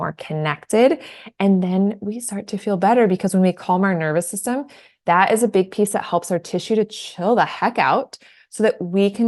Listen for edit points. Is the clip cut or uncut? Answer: uncut